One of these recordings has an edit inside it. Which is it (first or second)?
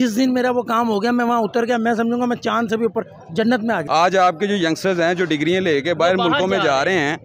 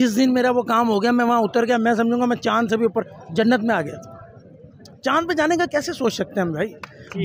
first